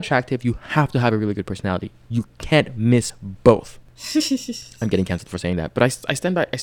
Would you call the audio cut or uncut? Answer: uncut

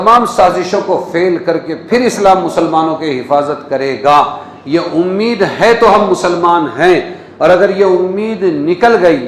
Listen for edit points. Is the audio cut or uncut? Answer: uncut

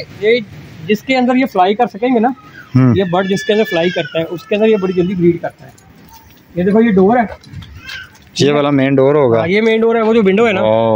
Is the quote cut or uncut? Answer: uncut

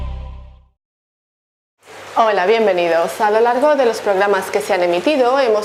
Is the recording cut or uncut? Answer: uncut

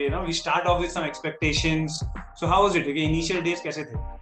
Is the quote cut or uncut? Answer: uncut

